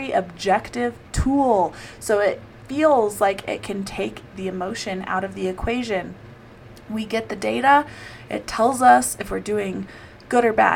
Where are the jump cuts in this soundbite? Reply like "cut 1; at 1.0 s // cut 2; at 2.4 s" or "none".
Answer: none